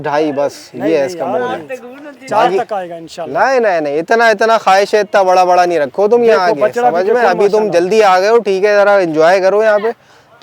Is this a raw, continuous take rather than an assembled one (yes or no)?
yes